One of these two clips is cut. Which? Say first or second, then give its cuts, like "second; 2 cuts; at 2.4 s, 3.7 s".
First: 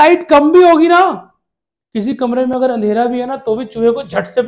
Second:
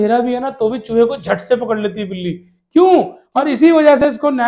second; 1 cut; at 3.2 s